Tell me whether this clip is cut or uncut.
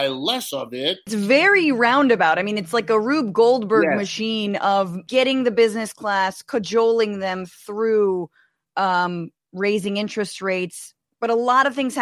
cut